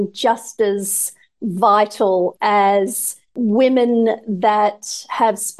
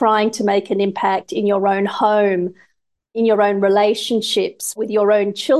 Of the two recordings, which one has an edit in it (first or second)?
first